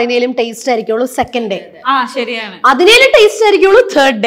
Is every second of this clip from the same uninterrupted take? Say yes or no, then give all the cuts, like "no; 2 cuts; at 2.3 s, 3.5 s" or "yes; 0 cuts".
yes; 0 cuts